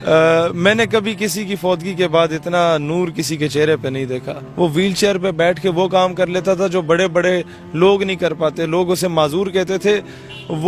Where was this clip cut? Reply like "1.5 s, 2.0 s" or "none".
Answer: 4.4 s